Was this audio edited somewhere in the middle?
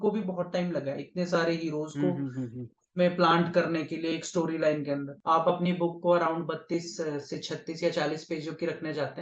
yes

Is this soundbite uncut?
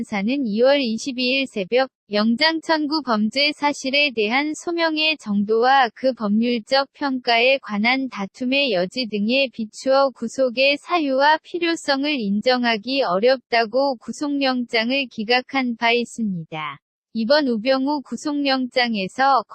yes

